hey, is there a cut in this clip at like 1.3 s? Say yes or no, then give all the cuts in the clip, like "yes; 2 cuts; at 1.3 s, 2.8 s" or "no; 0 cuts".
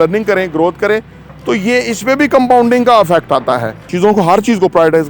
no; 1 cut; at 3.8 s